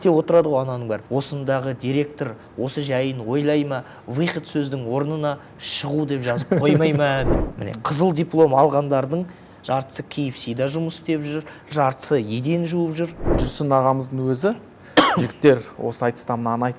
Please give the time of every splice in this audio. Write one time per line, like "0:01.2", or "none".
0:01.0
0:07.4
0:13.5